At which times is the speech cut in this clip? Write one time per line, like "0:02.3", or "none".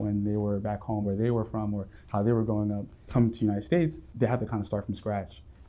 0:01.1
0:03.0
0:04.0